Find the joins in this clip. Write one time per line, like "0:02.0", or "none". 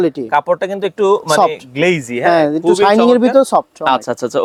none